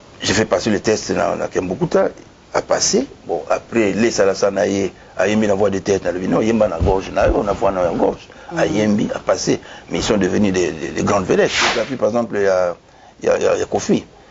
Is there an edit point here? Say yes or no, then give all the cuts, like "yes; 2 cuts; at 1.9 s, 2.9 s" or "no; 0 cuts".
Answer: yes; 1 cut; at 11.8 s